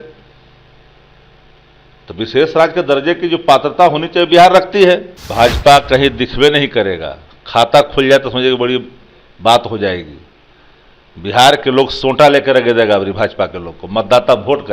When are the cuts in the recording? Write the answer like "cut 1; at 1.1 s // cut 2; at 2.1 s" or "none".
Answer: cut 1; at 5.2 s